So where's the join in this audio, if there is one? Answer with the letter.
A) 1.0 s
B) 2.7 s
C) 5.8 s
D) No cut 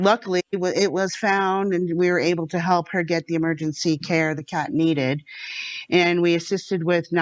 D